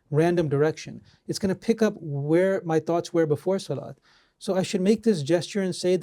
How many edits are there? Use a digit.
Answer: 0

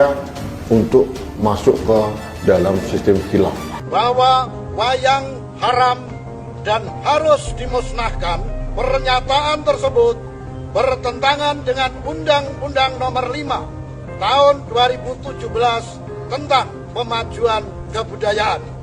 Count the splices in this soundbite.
1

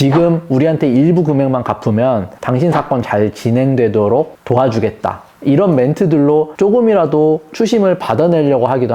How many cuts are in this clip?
1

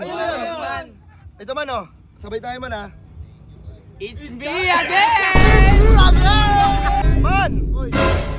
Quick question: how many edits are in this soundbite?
1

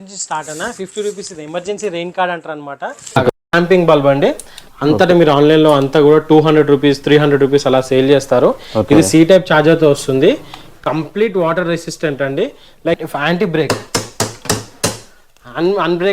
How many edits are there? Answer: 2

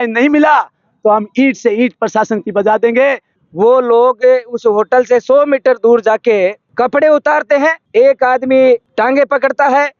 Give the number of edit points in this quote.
2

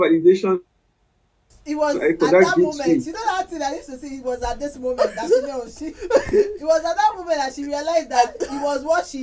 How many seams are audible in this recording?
1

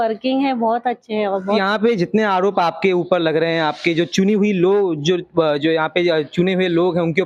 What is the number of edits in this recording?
1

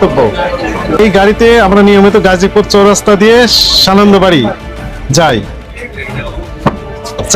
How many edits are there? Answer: 1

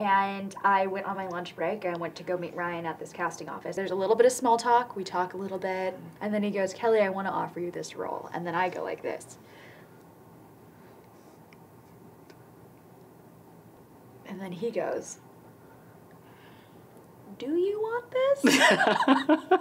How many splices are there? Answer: 4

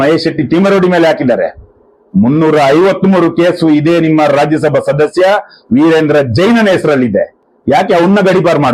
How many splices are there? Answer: 0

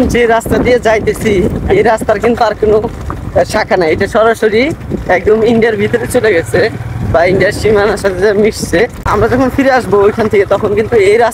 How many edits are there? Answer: 1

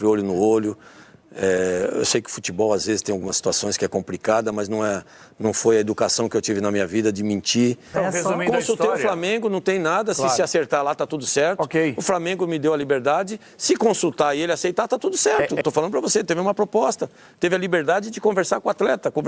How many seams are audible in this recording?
2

